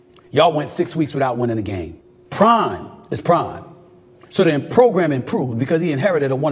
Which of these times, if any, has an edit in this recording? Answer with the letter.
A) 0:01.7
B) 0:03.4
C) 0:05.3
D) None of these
A